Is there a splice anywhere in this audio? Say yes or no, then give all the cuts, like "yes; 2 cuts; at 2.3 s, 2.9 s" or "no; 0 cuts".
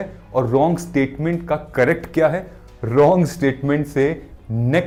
no; 0 cuts